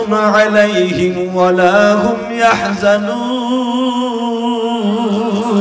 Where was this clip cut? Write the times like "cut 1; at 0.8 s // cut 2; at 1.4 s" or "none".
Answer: none